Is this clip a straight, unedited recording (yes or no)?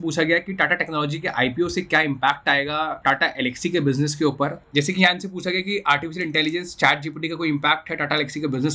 no